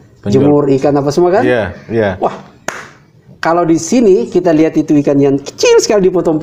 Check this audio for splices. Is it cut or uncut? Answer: uncut